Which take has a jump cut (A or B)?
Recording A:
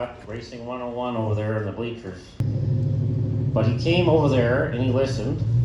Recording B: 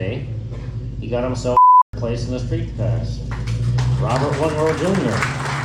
A